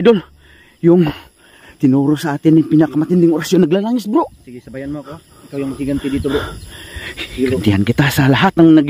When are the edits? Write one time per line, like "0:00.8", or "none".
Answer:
none